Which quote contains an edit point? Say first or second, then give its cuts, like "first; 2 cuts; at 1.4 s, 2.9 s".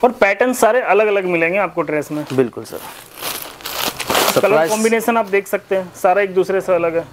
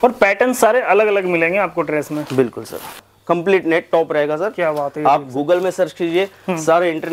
second; 1 cut; at 3.1 s